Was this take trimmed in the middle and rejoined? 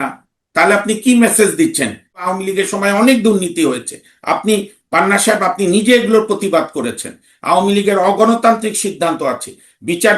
yes; 1 cut; at 2.2 s

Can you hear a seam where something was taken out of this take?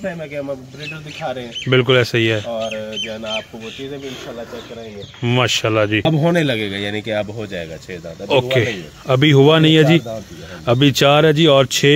yes; 1 cut; at 6.1 s

